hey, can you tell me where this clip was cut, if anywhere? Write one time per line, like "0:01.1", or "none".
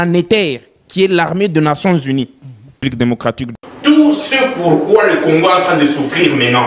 0:02.7